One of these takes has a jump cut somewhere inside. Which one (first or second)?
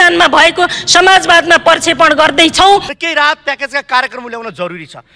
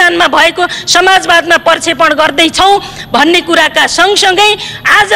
first